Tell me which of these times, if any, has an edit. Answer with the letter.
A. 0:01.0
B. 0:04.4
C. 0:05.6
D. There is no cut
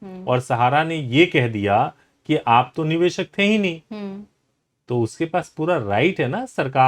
D